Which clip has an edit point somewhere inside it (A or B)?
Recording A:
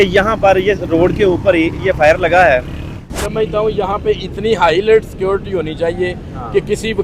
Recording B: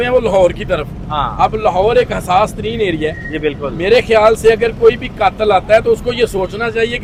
A